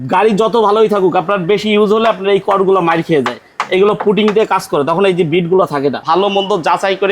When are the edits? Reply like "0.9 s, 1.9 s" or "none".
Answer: 6.0 s